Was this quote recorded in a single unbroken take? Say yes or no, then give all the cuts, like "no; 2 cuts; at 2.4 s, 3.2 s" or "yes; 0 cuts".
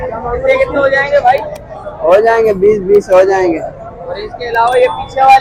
yes; 0 cuts